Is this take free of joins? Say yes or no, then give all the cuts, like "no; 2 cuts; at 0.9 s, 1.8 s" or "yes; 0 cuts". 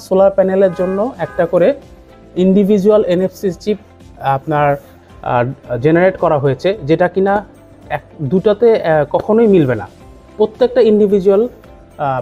yes; 0 cuts